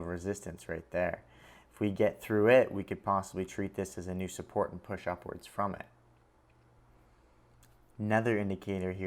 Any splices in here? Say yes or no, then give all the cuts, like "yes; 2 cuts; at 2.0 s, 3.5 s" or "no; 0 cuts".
no; 0 cuts